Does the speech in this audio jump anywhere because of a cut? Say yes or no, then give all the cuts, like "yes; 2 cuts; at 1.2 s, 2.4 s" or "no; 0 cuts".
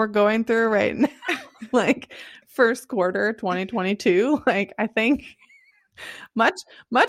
no; 0 cuts